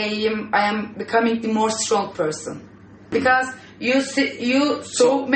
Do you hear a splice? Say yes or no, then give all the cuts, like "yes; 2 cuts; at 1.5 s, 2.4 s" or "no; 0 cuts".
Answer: yes; 1 cut; at 3.1 s